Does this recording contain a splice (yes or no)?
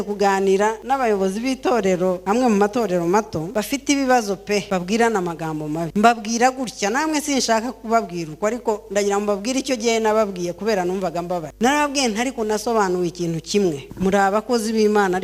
yes